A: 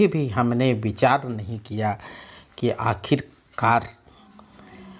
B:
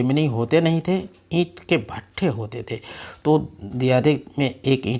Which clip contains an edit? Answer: B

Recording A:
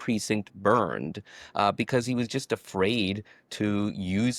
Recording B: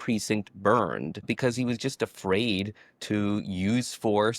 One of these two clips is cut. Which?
B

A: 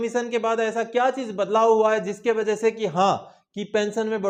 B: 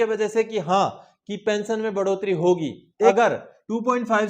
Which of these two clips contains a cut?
B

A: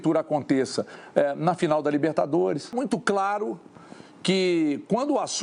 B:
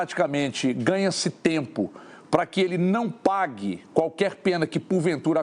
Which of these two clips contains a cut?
A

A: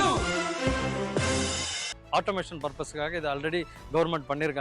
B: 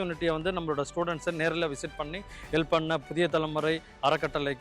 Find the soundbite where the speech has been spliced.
A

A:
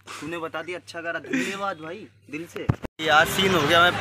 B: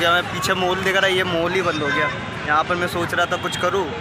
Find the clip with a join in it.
A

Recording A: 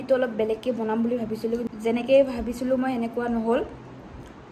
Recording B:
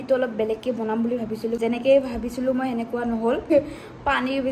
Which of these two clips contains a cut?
B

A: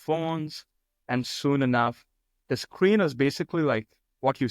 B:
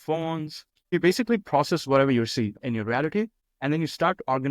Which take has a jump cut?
B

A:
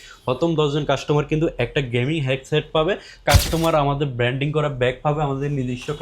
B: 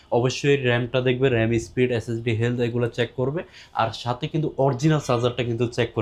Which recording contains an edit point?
A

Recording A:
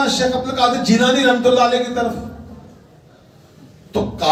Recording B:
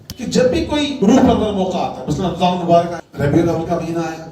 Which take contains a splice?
B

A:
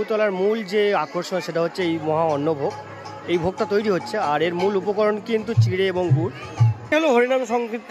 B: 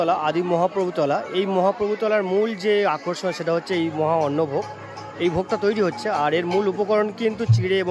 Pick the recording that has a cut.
A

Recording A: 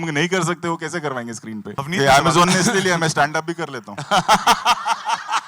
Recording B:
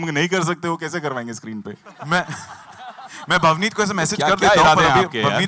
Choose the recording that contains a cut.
A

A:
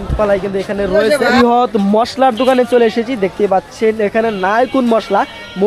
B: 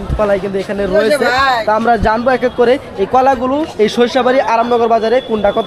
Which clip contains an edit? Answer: A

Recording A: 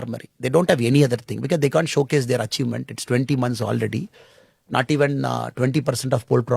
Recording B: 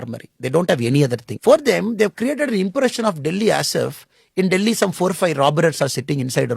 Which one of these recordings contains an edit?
B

